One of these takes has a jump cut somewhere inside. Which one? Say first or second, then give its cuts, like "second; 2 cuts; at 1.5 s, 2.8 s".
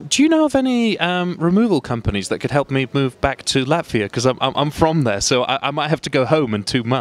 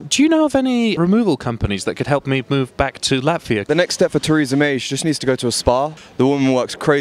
second; 3 cuts; at 1.0 s, 3.7 s, 6.0 s